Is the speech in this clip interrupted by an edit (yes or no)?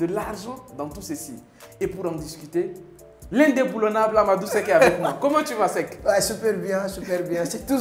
no